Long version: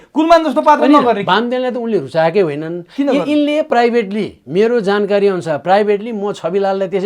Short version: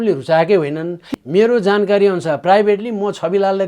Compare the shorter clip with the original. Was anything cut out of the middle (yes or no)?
yes